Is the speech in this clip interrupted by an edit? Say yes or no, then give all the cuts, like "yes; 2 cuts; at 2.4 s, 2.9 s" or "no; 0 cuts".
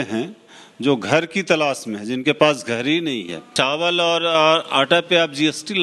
yes; 1 cut; at 3.4 s